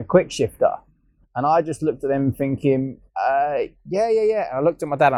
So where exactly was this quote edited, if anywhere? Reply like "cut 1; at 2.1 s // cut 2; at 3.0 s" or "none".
none